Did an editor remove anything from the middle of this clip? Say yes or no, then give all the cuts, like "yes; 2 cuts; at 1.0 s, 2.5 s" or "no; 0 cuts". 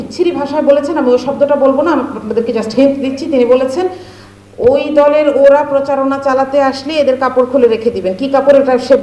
no; 0 cuts